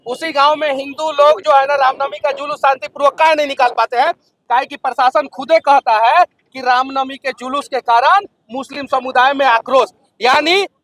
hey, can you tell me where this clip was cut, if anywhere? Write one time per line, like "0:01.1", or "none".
none